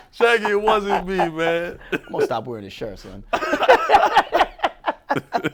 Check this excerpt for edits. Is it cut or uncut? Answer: uncut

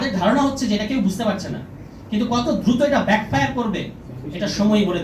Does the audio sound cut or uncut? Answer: uncut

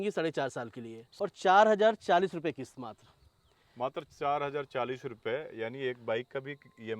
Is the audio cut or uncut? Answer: cut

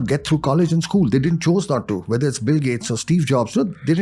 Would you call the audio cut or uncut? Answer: uncut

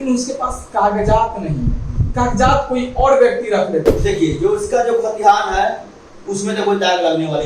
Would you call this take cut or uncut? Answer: cut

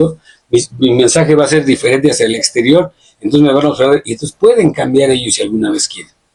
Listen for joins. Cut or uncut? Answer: uncut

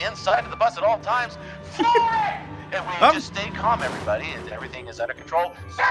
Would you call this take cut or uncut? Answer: uncut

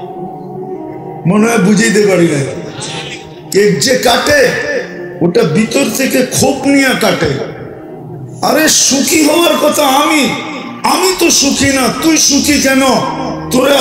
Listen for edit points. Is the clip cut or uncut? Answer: cut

